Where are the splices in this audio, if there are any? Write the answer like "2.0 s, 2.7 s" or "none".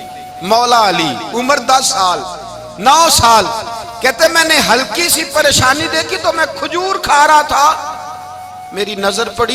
none